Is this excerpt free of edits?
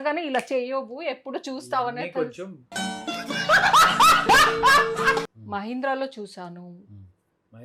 no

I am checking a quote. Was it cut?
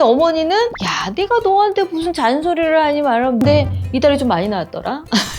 yes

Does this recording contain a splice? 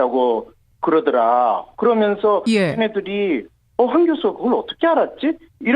yes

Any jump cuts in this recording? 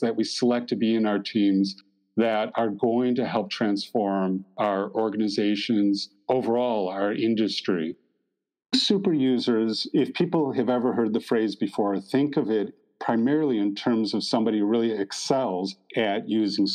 yes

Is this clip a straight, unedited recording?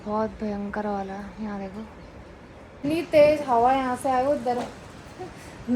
no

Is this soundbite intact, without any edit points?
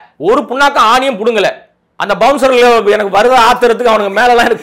no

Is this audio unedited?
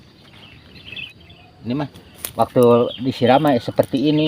no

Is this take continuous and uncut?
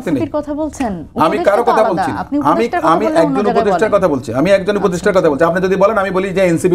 yes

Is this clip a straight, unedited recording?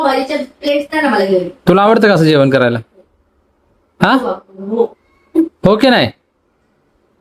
yes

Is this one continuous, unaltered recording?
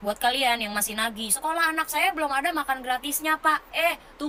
yes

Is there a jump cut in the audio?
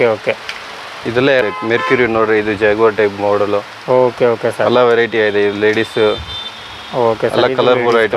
yes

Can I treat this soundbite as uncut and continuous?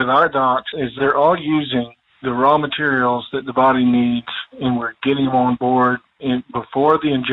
no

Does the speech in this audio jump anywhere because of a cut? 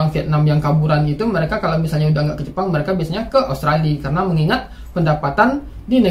no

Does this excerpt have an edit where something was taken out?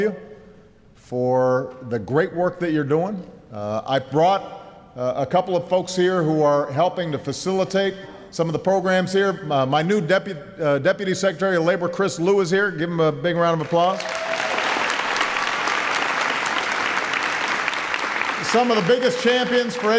yes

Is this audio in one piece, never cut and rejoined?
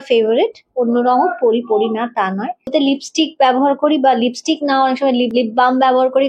no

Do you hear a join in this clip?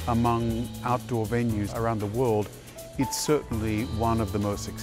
yes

